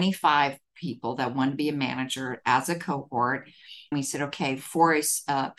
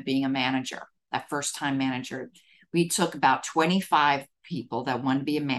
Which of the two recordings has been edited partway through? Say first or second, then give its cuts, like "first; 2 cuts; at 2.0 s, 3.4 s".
first; 1 cut; at 3.9 s